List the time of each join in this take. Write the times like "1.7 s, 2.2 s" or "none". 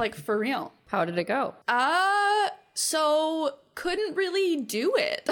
0.8 s, 1.6 s